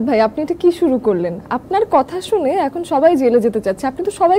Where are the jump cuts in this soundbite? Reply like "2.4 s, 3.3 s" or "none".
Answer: none